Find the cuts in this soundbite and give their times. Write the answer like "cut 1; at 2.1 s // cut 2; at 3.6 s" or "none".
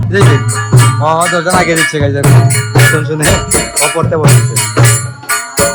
none

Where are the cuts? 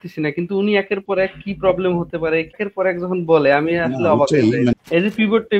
cut 1; at 2.6 s // cut 2; at 4.7 s

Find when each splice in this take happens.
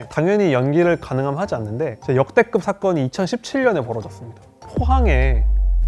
cut 1; at 2.0 s

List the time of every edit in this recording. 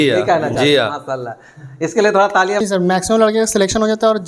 cut 1; at 2.6 s

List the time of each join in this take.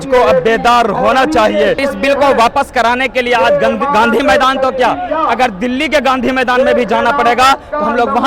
cut 1; at 1.8 s

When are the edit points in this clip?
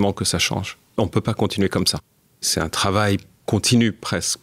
cut 1; at 0.8 s // cut 2; at 2.5 s // cut 3; at 3.3 s

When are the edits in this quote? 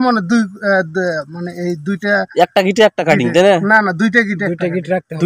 none

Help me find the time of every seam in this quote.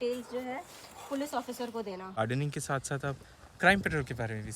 cut 1; at 2.2 s

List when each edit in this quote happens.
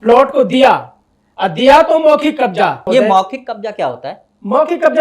cut 1; at 2.8 s

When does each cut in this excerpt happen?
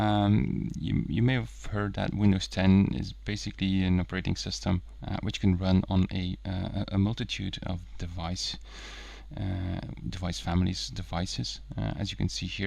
none

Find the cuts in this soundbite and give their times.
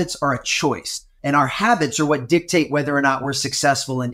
cut 1; at 1.1 s

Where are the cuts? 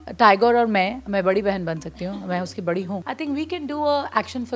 cut 1; at 3.0 s

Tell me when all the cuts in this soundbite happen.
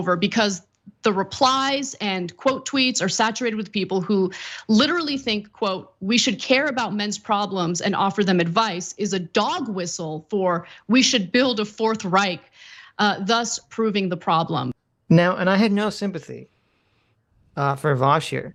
none

